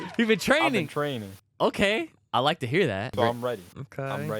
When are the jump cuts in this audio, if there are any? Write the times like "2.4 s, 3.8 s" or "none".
3.1 s

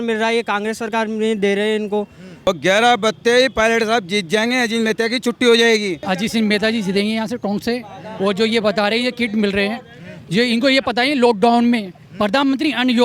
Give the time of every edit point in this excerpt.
2.5 s, 6.0 s

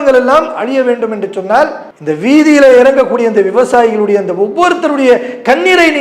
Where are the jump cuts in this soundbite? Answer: 1.9 s

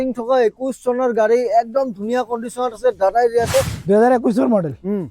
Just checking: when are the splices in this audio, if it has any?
3.7 s

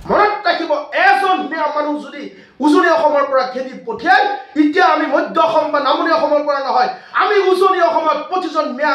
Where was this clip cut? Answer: none

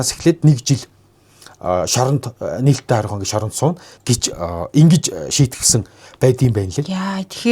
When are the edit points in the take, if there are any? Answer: 3.9 s

